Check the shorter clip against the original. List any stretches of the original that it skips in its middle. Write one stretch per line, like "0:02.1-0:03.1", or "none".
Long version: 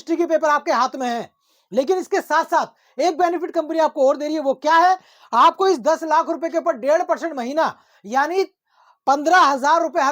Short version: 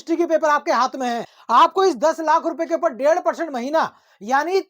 0:01.3-0:05.2